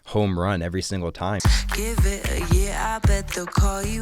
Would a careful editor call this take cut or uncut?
cut